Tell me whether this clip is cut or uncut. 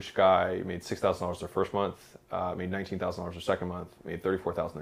uncut